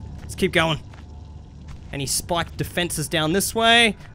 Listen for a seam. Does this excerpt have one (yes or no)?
no